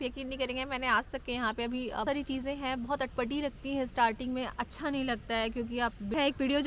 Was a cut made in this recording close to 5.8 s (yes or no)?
yes